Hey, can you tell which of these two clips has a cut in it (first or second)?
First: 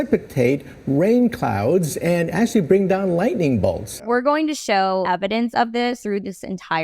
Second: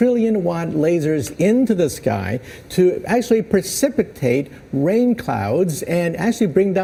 first